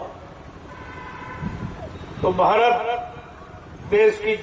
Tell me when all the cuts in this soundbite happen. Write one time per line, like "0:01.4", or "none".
none